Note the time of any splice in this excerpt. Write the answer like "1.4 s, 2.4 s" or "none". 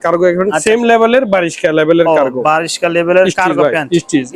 none